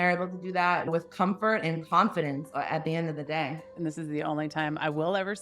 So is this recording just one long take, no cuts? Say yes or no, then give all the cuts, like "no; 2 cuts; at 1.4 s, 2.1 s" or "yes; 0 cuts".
no; 2 cuts; at 0.9 s, 3.7 s